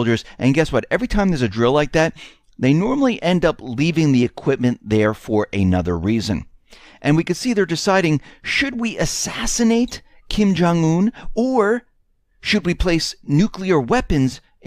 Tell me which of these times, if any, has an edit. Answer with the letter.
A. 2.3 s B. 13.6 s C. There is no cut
C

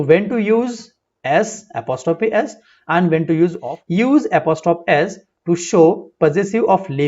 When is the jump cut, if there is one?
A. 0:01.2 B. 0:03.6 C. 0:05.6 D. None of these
B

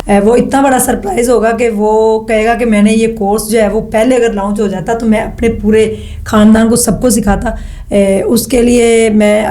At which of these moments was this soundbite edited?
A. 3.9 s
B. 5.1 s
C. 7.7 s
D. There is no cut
D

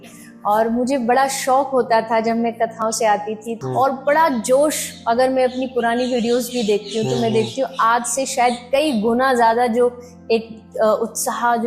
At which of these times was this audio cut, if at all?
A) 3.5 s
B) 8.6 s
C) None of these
A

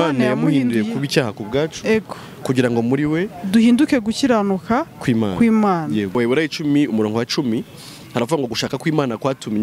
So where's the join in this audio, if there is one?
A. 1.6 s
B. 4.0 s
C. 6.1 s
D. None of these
C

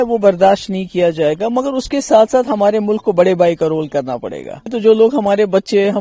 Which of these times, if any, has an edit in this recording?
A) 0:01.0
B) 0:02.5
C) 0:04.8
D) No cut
C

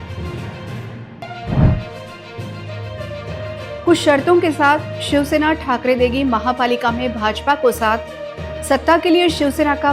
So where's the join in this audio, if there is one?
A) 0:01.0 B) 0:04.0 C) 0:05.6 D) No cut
A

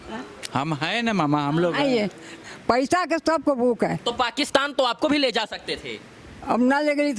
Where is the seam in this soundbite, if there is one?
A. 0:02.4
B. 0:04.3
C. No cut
A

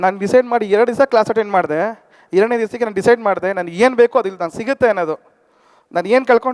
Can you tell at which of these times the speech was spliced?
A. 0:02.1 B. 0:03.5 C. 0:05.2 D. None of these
D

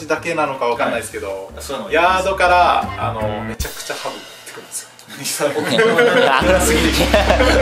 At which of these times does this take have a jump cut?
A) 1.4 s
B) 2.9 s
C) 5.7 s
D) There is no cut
D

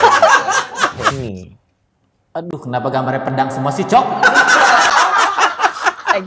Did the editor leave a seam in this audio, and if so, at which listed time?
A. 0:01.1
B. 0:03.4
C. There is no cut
A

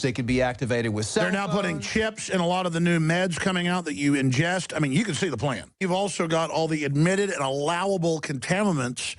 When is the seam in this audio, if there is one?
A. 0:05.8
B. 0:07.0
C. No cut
A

